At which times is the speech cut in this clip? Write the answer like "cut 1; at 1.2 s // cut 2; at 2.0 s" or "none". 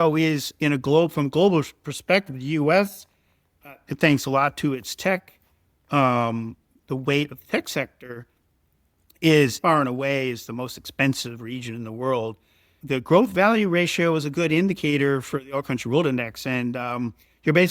cut 1; at 9.6 s // cut 2; at 12.7 s